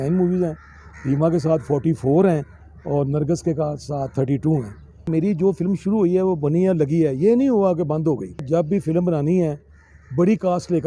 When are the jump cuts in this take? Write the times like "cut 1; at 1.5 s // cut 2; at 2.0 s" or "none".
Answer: cut 1; at 5.1 s // cut 2; at 8.4 s